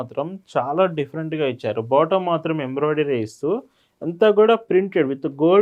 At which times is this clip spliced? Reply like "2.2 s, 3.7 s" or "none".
none